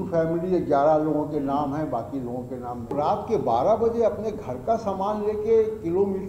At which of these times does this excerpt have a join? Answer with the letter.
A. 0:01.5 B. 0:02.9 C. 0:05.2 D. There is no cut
B